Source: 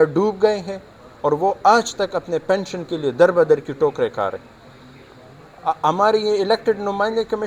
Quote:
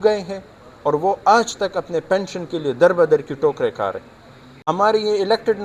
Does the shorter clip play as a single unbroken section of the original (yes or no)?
no